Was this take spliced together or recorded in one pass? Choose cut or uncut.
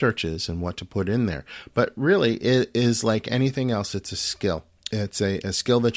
cut